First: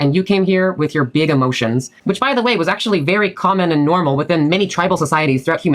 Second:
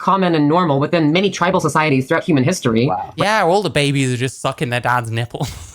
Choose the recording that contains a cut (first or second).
first